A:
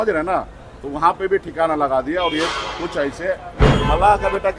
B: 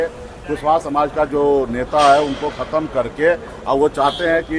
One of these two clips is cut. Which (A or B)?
A